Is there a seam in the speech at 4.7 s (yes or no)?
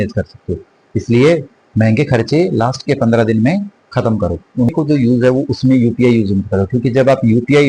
yes